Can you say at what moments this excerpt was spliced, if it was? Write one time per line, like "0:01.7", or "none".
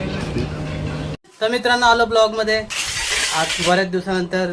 0:01.1

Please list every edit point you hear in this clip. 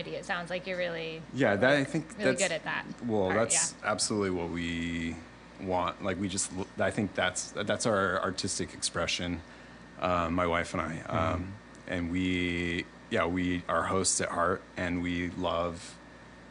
none

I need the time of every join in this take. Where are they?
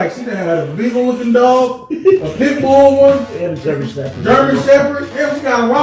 none

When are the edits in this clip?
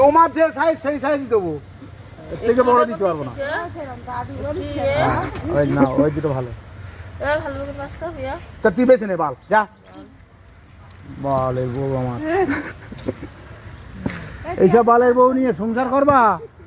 none

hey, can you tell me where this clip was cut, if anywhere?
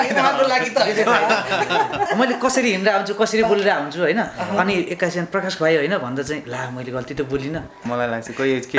0:02.1
0:07.8

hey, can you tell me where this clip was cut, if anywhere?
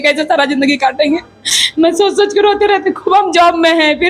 none

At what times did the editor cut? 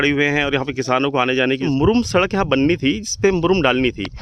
0:01.6

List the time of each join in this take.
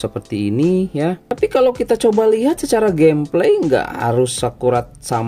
0:01.2

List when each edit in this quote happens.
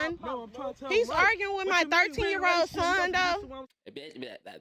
none

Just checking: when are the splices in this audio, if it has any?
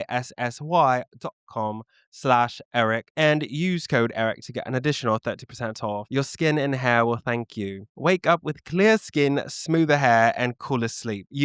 none

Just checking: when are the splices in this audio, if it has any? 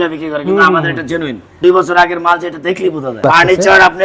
0:01.6
0:03.2

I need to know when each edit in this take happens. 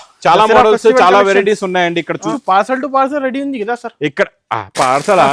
0:02.3

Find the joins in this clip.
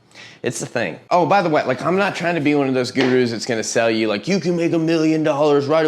0:01.0

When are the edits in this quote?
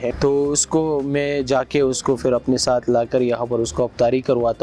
none

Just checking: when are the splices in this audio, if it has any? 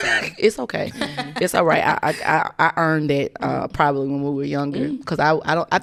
none

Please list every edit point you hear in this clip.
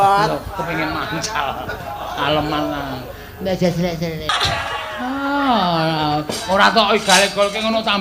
0:04.3

